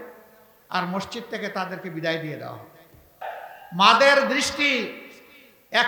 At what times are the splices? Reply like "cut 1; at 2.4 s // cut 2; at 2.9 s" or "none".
cut 1; at 3.2 s